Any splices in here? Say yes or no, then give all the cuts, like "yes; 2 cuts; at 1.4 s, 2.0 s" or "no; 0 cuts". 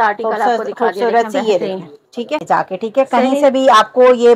yes; 1 cut; at 2.4 s